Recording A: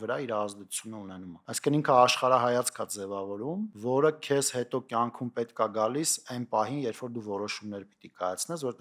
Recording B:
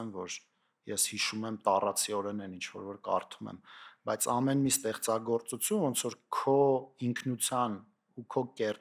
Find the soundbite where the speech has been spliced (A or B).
A